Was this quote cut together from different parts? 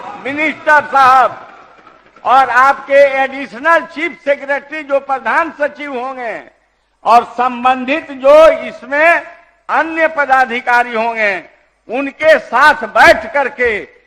no; 0 cuts

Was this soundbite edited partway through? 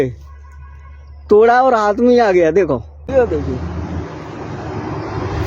yes; 1 cut; at 3.1 s

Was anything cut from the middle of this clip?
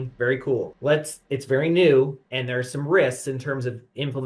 no; 0 cuts

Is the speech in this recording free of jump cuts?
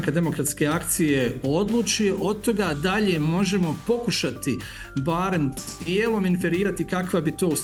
yes; 0 cuts

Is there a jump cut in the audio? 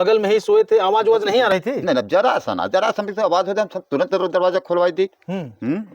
no; 0 cuts

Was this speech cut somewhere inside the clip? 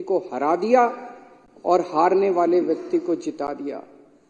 no; 0 cuts

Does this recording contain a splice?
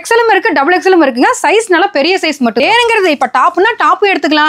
yes; 1 cut; at 2.6 s

